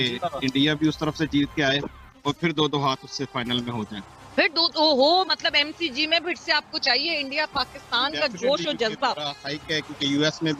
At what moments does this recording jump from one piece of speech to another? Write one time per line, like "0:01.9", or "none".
none